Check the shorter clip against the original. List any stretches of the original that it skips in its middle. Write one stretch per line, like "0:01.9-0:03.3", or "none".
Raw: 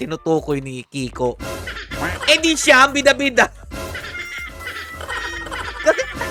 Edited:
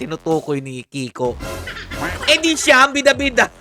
none